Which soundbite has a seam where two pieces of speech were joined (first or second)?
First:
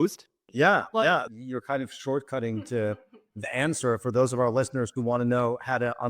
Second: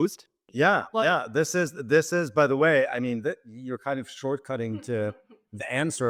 first